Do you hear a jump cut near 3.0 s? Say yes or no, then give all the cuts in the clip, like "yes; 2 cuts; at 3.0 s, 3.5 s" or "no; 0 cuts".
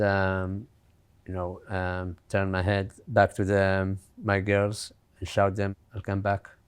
yes; 1 cut; at 3.0 s